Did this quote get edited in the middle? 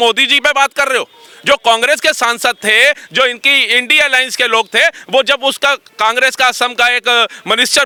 no; 0 cuts

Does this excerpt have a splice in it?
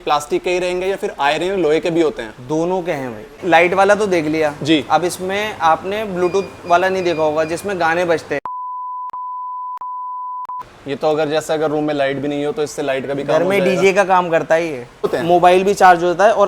yes; 4 cuts; at 3.4 s, 8.7 s, 10.6 s, 15.1 s

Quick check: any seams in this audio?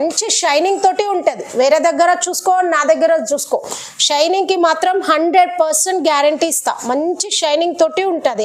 no; 0 cuts

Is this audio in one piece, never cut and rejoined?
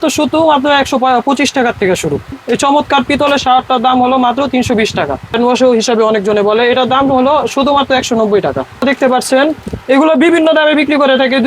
no; 3 cuts; at 2.4 s, 5.3 s, 8.8 s

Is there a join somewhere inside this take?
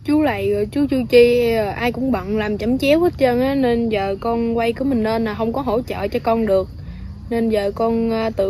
no; 0 cuts

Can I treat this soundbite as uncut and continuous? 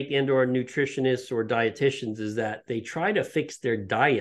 yes; 0 cuts

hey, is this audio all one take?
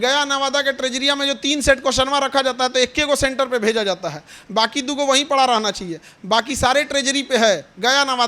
yes; 0 cuts

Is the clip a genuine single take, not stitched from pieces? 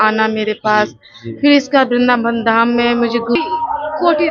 no; 1 cut; at 3.4 s

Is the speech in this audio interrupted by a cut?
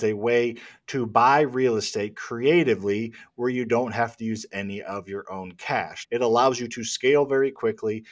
yes; 1 cut; at 6.0 s

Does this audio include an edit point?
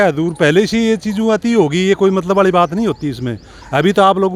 no; 0 cuts

